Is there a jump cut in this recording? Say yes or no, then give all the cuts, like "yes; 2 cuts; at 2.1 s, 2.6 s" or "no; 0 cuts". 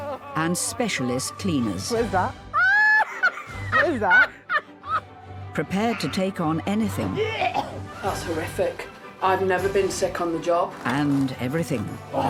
no; 0 cuts